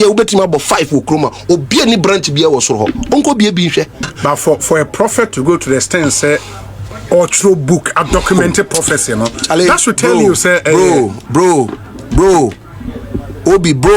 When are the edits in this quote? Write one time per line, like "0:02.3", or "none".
0:04.1